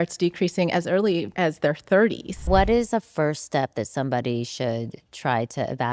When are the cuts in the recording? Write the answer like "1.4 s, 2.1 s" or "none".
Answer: 1.3 s, 2.5 s